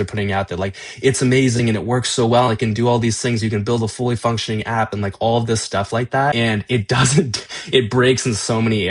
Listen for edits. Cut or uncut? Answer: cut